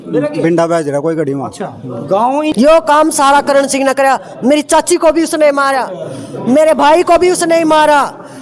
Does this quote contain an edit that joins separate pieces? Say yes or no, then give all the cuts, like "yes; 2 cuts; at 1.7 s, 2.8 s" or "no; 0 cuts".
yes; 1 cut; at 2.5 s